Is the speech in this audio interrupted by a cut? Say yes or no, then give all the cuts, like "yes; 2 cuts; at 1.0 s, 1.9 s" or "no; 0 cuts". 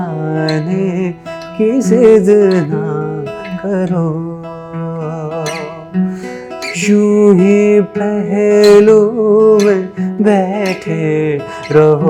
no; 0 cuts